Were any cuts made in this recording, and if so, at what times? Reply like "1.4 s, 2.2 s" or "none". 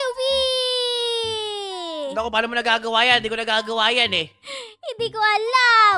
none